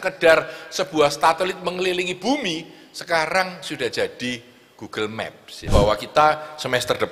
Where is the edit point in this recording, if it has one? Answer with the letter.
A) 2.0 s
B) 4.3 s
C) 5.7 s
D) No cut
C